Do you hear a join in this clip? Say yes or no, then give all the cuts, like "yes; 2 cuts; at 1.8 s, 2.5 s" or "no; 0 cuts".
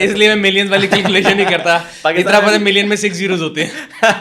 no; 0 cuts